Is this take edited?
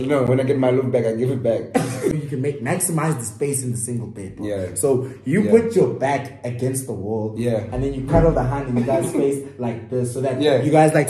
yes; 1 cut; at 2.0 s

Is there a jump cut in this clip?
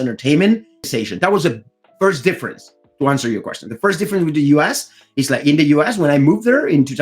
yes; 1 cut; at 1.0 s

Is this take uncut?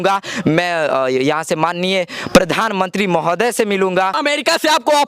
no; 1 cut; at 4.1 s

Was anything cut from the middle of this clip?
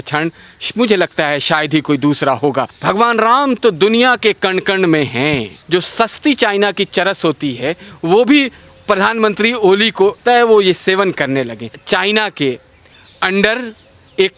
yes; 4 cuts; at 2.7 s, 5.5 s, 10.2 s, 11.7 s

